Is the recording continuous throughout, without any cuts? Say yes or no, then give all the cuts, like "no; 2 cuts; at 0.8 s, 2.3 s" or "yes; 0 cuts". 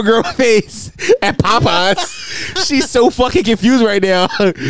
yes; 0 cuts